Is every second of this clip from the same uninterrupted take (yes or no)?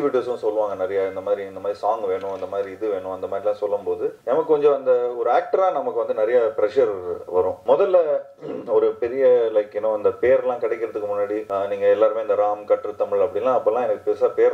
no